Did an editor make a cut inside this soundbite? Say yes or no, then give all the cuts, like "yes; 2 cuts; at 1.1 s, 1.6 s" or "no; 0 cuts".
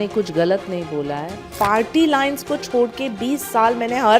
yes; 1 cut; at 1.4 s